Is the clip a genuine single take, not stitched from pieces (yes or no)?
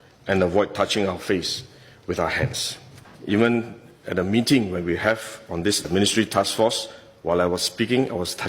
no